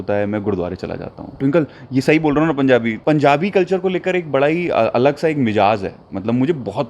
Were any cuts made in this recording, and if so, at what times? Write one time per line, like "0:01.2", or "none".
0:01.4
0:02.9

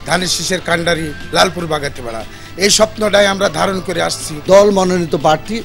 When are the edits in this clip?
0:04.3

